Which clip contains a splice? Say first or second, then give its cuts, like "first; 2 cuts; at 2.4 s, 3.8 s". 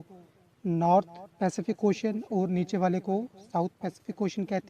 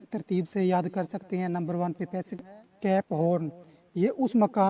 second; 1 cut; at 2.4 s